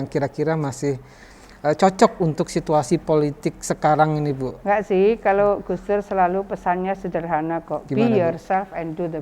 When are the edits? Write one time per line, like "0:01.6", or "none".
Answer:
none